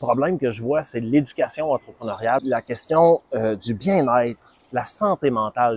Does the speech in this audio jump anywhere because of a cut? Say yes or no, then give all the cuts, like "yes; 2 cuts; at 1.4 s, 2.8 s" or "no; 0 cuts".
yes; 1 cut; at 2.4 s